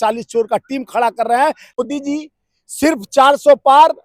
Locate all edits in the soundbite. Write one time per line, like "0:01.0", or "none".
0:01.8

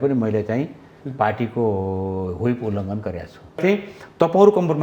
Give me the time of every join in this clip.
0:03.6

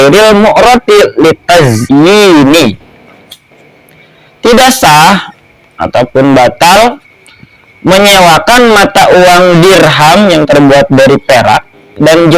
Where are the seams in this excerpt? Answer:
0:01.8

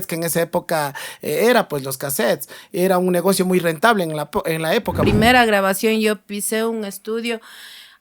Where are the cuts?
0:05.0

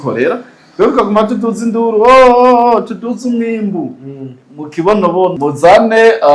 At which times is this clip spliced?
0:05.4

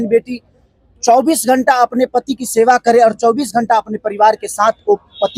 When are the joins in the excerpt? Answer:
none

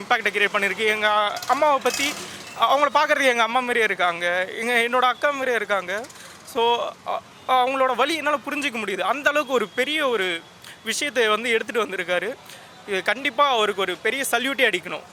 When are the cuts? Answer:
none

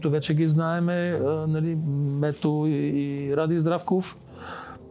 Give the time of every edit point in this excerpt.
none

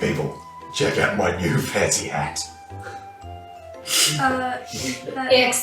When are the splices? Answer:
none

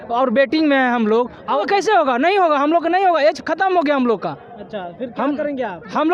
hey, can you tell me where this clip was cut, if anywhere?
0:01.6

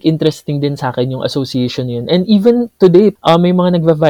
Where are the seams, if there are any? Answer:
0:03.1

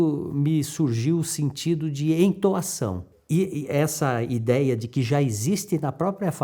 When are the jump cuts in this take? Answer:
0:03.4

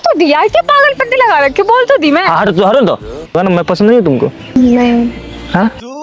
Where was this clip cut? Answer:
0:03.4
0:04.4

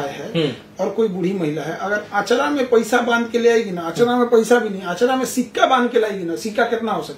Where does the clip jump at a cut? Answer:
none

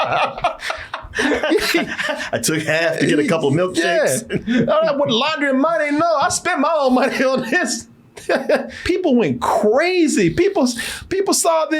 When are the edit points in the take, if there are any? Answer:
0:08.7

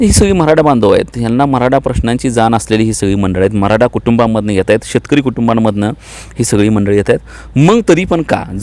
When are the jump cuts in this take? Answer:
none

